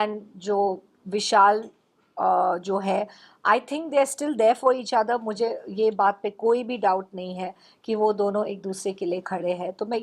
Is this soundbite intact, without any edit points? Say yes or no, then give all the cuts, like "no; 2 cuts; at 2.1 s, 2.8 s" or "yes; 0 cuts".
yes; 0 cuts